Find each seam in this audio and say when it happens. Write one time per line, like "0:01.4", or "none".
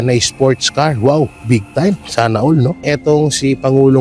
0:02.8